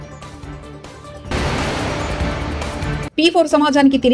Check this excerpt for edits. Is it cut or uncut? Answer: uncut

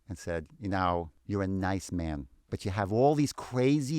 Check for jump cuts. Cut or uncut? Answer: cut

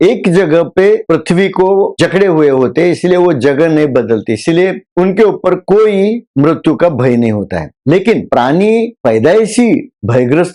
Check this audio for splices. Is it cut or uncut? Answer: uncut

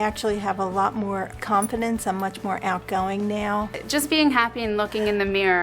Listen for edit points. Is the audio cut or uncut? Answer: cut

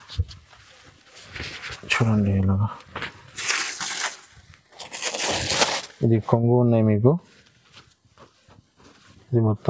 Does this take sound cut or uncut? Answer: uncut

